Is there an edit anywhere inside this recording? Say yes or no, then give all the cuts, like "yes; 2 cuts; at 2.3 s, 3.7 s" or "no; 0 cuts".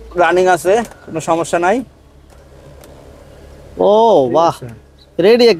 no; 0 cuts